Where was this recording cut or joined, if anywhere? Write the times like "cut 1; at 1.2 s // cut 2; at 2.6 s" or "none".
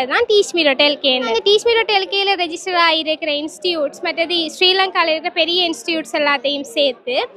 cut 1; at 1.3 s